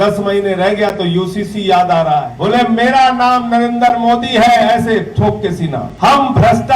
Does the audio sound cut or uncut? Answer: cut